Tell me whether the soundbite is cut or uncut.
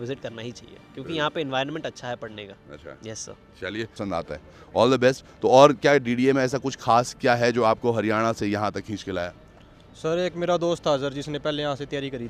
cut